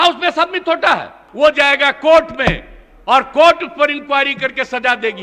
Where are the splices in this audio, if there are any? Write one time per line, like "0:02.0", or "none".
0:01.2